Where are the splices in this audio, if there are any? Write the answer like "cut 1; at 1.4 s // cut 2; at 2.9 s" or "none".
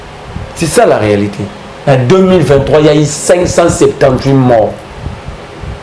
cut 1; at 1.7 s